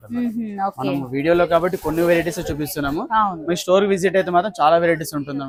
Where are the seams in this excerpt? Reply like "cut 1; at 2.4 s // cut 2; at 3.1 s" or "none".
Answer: none